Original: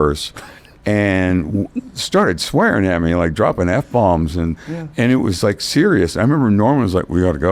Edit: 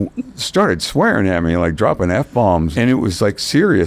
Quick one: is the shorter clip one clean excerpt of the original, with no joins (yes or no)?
no